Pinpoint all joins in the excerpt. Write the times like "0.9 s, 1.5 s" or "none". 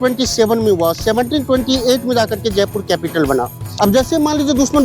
3.6 s